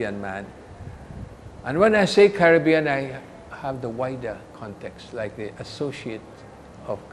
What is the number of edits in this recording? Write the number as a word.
zero